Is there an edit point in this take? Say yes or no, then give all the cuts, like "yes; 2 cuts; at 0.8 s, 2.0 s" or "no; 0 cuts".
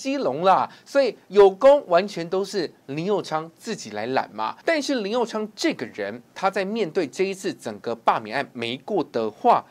yes; 2 cuts; at 4.6 s, 6.3 s